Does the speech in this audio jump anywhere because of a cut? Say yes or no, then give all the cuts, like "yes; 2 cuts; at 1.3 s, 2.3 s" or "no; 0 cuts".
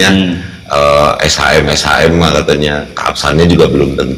no; 0 cuts